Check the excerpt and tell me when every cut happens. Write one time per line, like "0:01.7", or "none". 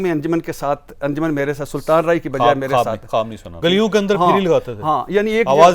0:03.5